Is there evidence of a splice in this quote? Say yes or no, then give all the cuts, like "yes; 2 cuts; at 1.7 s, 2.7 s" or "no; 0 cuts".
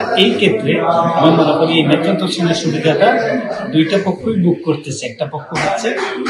no; 0 cuts